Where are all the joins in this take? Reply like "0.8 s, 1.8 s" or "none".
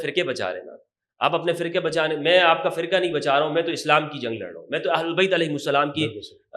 none